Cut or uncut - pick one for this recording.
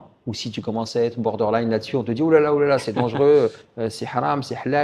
uncut